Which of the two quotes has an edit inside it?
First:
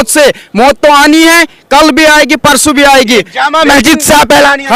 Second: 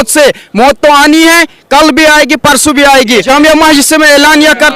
second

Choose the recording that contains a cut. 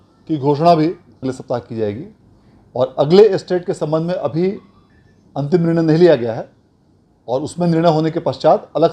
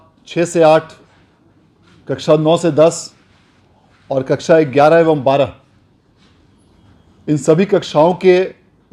first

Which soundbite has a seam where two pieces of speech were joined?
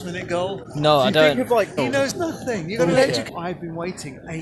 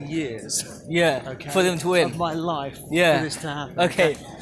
first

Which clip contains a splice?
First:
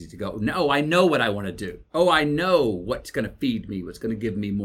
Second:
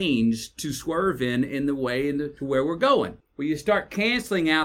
second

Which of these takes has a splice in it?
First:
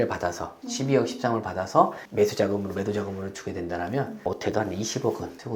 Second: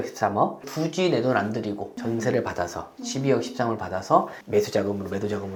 first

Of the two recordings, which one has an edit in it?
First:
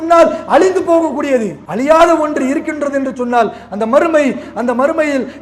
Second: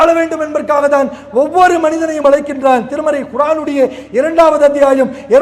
first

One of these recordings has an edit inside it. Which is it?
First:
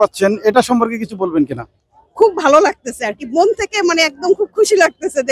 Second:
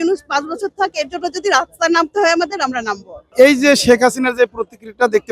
second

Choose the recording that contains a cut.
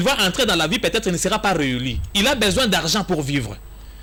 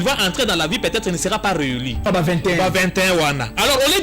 second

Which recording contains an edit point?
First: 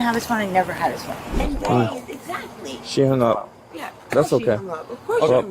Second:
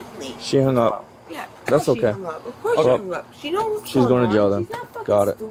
first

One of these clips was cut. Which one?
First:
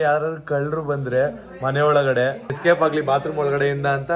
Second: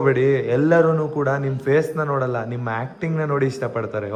first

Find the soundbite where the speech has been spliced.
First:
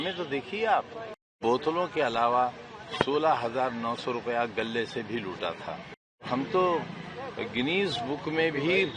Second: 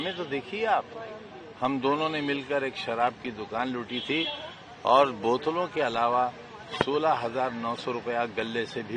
first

